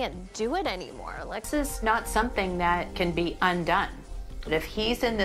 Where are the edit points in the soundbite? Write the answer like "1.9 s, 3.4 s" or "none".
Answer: 1.4 s